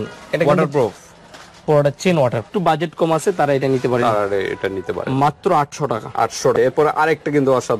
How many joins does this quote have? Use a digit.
2